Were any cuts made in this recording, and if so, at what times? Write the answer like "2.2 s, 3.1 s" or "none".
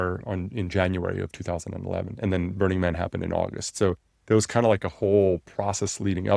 none